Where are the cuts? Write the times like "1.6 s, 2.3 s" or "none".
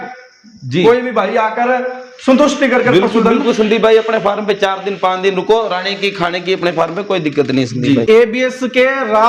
8.0 s